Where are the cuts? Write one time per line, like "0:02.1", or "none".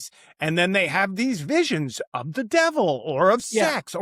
none